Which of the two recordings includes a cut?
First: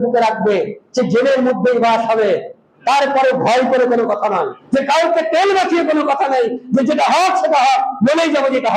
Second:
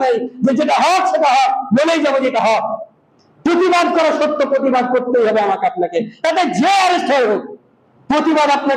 first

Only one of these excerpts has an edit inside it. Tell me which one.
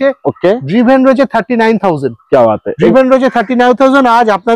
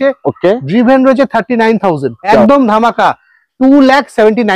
second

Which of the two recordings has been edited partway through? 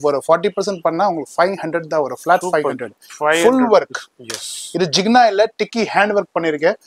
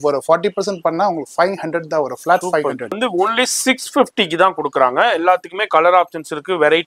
second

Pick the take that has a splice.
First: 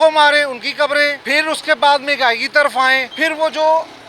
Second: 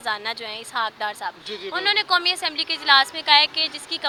first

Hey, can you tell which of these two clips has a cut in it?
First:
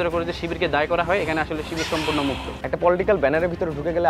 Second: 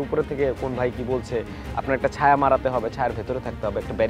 first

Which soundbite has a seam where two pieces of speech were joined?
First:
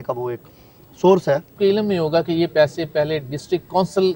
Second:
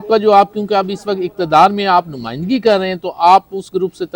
first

